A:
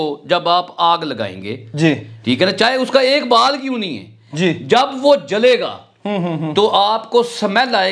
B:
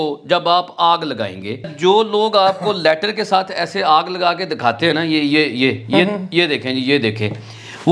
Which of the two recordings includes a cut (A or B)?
B